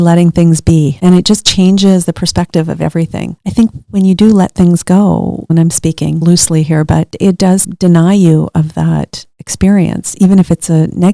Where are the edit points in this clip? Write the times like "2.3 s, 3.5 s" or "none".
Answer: 3.3 s